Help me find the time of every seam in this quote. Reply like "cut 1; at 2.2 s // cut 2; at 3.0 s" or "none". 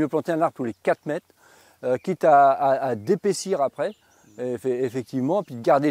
none

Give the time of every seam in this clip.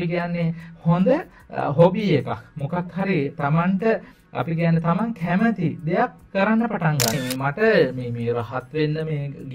cut 1; at 7.1 s

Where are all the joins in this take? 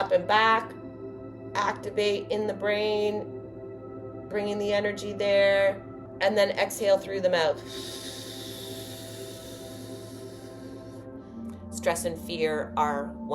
cut 1; at 11.3 s

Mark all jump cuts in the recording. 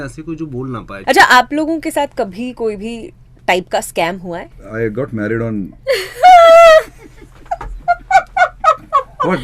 cut 1; at 0.9 s // cut 2; at 4.5 s

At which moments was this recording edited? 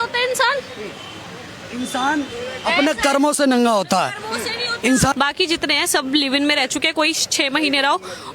cut 1; at 5.1 s

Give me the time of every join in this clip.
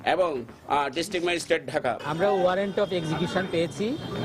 cut 1; at 2.0 s

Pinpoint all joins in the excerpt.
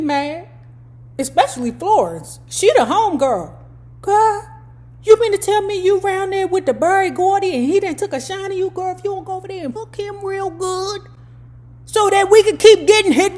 cut 1; at 9.8 s

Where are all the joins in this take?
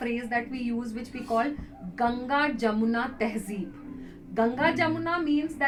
none

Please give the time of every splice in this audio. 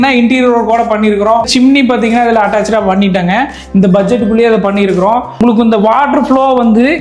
cut 1; at 1.5 s // cut 2; at 5.4 s

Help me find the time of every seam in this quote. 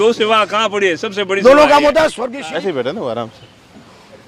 cut 1; at 2.2 s

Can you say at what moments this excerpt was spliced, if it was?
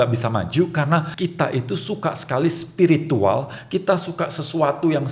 cut 1; at 1.1 s

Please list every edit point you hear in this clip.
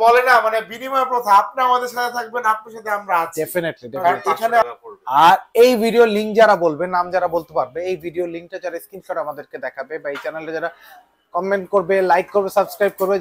cut 1; at 4.6 s

